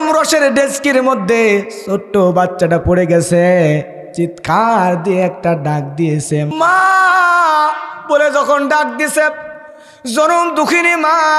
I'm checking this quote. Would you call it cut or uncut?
cut